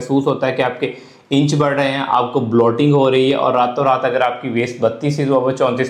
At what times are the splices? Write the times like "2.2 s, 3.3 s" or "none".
none